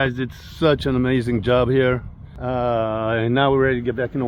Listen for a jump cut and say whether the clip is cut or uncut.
uncut